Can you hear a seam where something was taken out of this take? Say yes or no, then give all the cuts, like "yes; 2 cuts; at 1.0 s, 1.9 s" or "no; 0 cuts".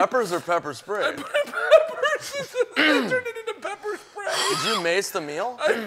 no; 0 cuts